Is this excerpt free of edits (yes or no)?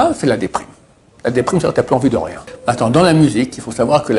no